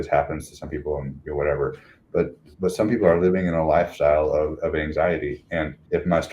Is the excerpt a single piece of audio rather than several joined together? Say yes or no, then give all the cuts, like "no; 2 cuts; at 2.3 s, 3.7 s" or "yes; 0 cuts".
yes; 0 cuts